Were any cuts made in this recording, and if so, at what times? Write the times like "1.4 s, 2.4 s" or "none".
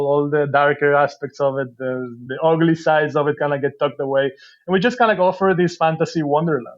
2.2 s